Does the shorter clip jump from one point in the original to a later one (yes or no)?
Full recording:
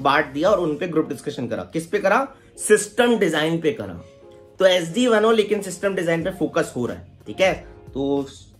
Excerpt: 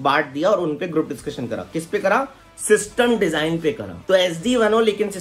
yes